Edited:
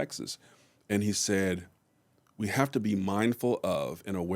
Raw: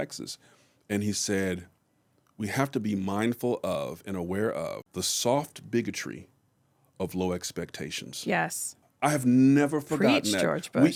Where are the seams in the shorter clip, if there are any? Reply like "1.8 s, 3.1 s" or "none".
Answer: none